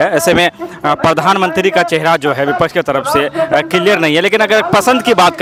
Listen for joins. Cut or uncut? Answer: uncut